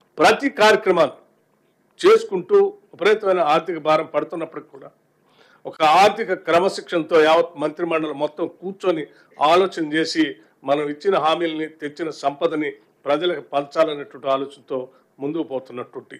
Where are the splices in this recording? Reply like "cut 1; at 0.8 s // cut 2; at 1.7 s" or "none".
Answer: none